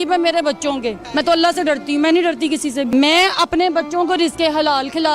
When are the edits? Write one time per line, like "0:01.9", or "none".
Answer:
0:01.0
0:02.9